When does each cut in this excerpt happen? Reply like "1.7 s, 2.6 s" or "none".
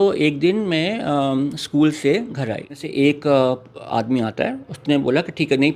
2.9 s